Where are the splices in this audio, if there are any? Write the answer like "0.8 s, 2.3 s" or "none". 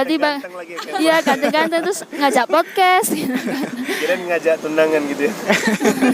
none